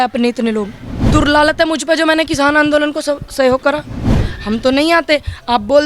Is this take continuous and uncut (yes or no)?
no